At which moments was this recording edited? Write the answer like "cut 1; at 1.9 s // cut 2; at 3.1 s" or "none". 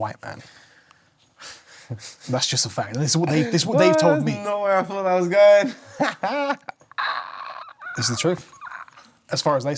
none